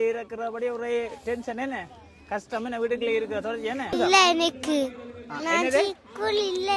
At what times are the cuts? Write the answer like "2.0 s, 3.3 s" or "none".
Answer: 3.9 s